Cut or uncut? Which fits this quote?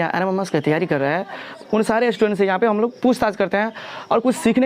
cut